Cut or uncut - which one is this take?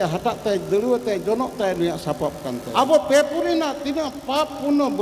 cut